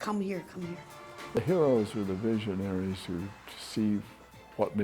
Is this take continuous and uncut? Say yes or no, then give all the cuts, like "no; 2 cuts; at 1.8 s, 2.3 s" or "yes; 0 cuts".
no; 1 cut; at 1.4 s